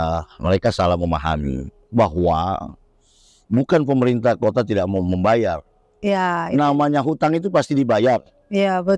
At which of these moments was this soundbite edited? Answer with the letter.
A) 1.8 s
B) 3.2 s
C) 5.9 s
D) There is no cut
D